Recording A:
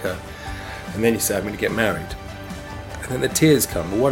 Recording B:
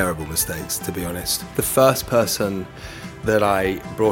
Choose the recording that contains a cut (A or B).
B